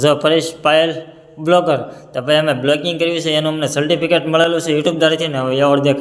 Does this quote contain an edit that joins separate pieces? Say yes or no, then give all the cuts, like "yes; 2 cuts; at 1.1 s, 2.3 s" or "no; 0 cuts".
no; 0 cuts